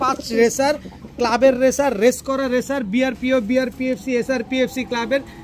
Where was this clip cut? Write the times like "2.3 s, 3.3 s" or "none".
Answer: none